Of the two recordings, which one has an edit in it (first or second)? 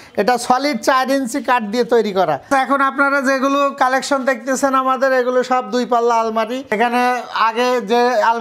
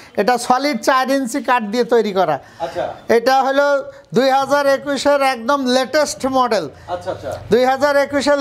first